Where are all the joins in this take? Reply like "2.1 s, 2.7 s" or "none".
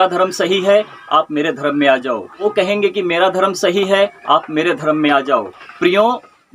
2.4 s, 5.6 s